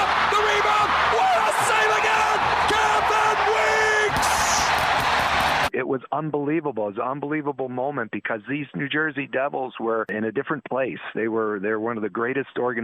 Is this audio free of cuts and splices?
yes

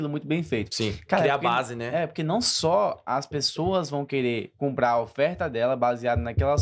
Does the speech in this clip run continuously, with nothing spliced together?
yes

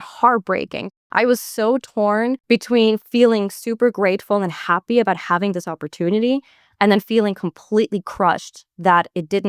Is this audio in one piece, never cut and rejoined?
no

